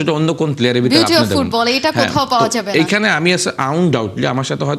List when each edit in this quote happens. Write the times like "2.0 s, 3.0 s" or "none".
none